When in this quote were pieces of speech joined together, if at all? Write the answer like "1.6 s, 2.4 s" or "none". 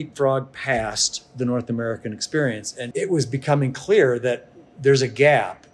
2.7 s